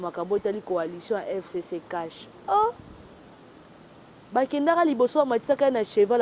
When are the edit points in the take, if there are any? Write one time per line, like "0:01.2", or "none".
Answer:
none